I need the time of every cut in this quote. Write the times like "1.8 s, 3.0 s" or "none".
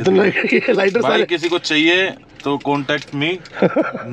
none